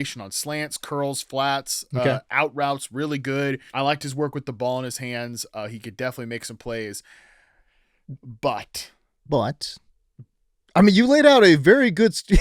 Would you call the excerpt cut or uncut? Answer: cut